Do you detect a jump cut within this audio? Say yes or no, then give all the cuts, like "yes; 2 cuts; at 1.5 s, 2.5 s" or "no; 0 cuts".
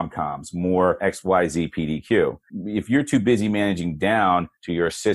yes; 2 cuts; at 1.0 s, 2.5 s